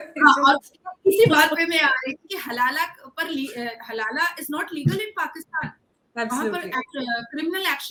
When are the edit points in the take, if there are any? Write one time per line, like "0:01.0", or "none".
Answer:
none